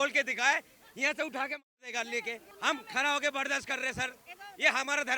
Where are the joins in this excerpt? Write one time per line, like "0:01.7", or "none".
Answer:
0:02.5

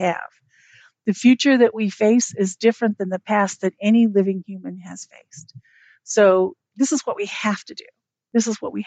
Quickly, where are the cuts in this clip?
0:06.6

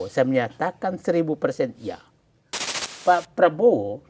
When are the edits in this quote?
0:02.8

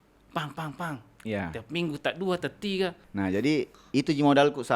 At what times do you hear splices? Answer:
0:03.0

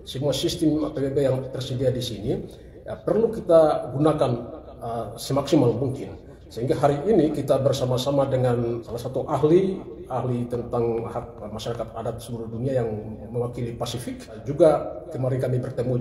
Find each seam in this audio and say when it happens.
0:08.8
0:14.4

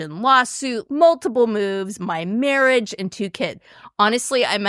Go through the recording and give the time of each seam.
0:00.8
0:03.6

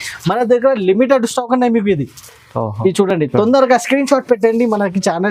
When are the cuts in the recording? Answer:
none

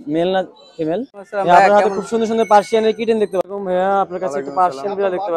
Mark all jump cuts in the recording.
0:01.2
0:03.5

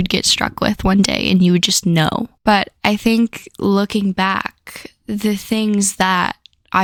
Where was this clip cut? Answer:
none

